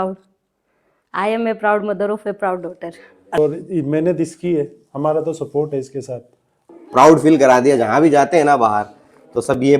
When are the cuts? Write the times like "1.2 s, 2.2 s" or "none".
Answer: 3.4 s, 6.6 s

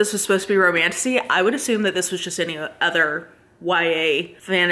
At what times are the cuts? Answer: none

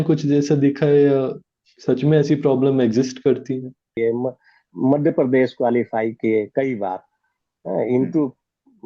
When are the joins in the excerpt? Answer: 3.9 s

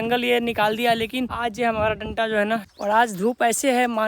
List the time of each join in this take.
1.3 s, 2.7 s

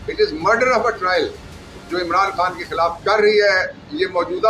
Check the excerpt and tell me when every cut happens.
3.0 s

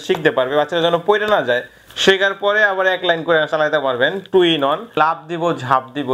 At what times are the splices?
5.0 s

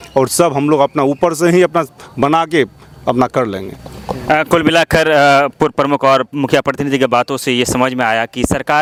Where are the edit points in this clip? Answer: none

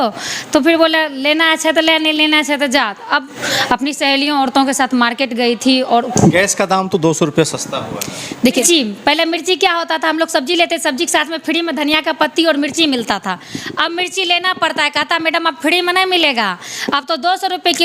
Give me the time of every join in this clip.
3.5 s, 6.1 s, 8.7 s

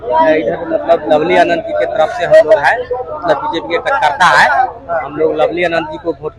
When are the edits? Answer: none

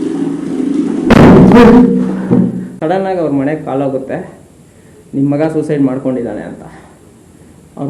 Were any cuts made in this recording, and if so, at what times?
2.7 s

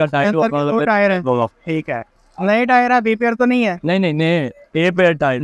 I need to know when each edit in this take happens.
none

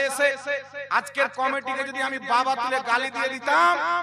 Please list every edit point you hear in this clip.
none

